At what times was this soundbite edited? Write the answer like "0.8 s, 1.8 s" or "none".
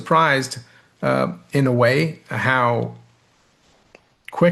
none